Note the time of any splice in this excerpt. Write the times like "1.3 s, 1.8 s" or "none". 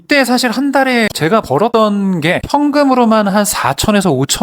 1.1 s